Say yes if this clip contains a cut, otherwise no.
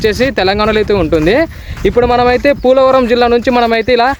no